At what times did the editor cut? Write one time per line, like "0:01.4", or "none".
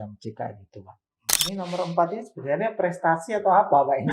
0:01.3